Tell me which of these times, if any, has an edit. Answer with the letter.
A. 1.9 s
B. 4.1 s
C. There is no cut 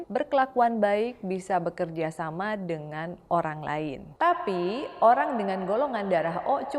B